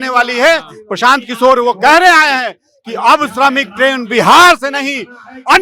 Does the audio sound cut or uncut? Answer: uncut